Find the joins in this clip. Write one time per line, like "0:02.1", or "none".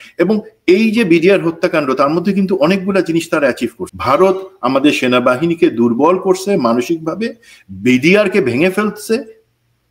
0:03.8